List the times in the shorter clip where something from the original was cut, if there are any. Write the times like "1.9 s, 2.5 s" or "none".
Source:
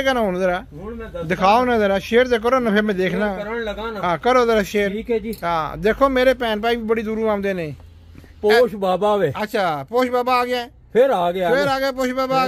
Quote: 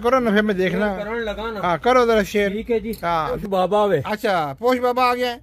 3.4 s